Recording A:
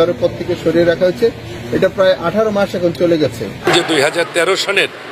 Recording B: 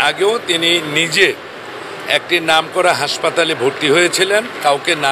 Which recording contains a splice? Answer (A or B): A